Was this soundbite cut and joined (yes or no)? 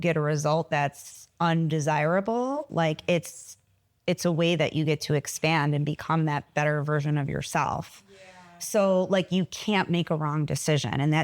no